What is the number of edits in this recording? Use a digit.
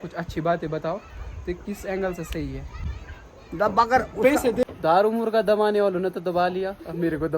1